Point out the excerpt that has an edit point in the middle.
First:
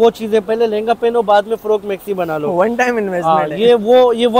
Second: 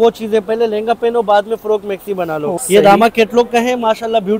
second; 1 cut; at 2.5 s

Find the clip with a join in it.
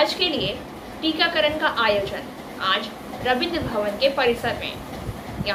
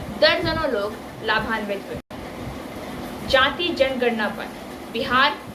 second; 1 cut; at 2.0 s

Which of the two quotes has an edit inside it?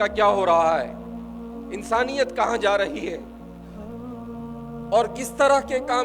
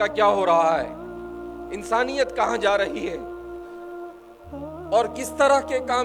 first; 2 cuts; at 3.2 s, 4.6 s

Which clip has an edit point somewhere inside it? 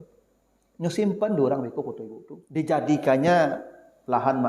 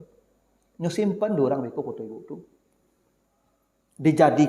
first; 1 cut; at 2.9 s

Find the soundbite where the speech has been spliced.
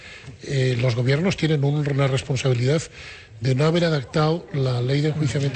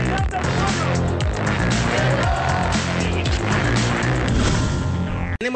second; 1 cut; at 2.2 s

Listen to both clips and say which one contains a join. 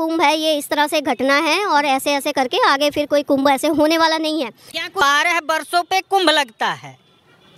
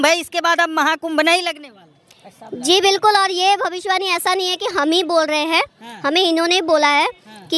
first; 1 cut; at 4.9 s

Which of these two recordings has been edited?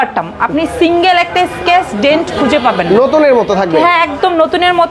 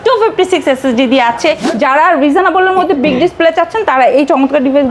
second; 1 cut; at 1.7 s

